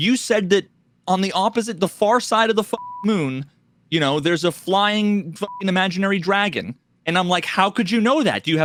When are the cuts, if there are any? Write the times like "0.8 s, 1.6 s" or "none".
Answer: none